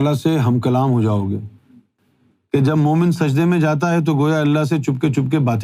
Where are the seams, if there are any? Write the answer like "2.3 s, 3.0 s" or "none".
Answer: 1.9 s